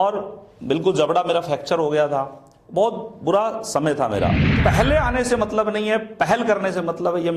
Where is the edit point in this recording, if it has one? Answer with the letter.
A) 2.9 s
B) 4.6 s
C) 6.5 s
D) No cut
B